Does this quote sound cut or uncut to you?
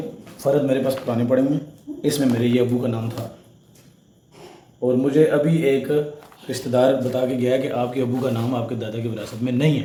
uncut